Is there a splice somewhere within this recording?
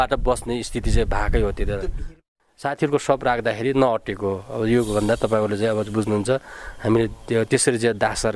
yes; 1 cut; at 2.2 s

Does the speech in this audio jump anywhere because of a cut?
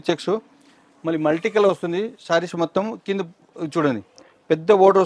no; 0 cuts

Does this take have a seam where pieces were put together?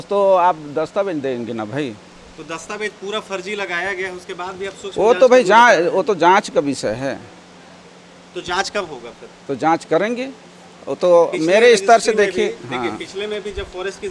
no; 0 cuts

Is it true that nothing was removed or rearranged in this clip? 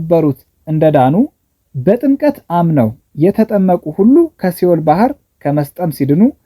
yes; 0 cuts

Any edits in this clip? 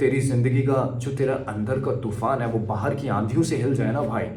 no; 0 cuts

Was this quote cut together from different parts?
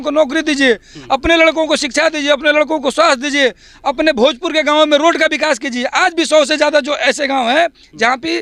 no; 0 cuts

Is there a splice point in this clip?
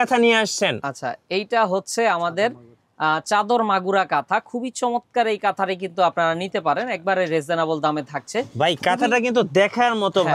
no; 0 cuts

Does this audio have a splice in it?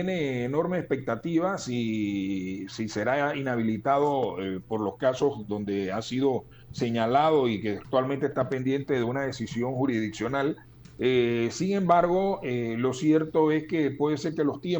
no; 0 cuts

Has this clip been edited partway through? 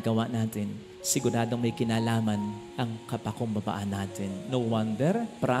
no; 0 cuts

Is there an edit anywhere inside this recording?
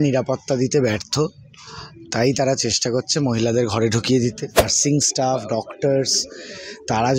yes; 1 cut; at 4.7 s

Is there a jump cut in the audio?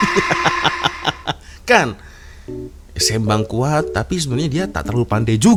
no; 0 cuts

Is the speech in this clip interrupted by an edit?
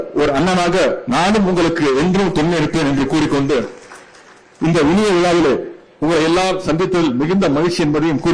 no; 0 cuts

